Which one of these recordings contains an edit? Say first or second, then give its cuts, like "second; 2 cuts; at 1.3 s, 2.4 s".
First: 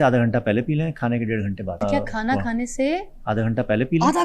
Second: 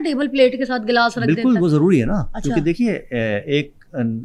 first; 1 cut; at 1.8 s